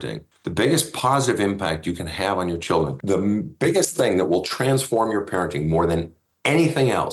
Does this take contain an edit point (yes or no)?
no